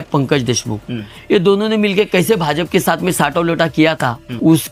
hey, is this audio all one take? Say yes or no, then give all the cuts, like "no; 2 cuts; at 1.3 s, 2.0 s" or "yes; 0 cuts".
yes; 0 cuts